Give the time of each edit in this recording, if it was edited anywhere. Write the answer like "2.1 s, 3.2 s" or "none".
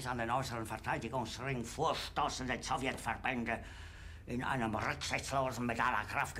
none